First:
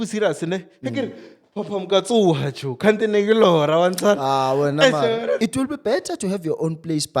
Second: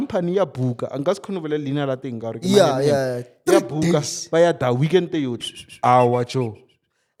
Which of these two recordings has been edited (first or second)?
first